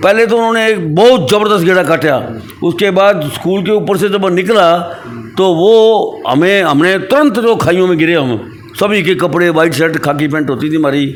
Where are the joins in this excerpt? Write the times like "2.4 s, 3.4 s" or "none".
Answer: none